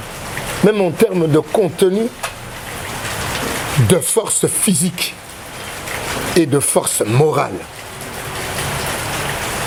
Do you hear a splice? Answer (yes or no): no